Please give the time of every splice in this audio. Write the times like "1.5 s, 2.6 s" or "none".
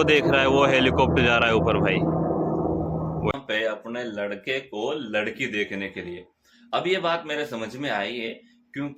3.3 s